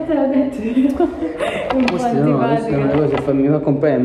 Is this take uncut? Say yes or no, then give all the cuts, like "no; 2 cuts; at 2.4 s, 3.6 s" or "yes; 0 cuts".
yes; 0 cuts